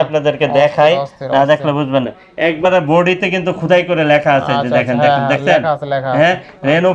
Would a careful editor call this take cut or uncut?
uncut